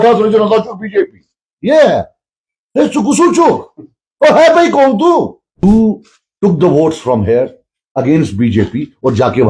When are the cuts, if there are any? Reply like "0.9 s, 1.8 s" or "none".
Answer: 5.6 s